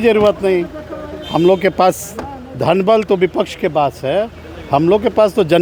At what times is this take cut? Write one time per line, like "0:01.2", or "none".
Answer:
none